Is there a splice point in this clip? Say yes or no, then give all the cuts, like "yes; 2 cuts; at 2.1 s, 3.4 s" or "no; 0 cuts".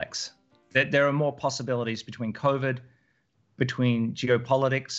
no; 0 cuts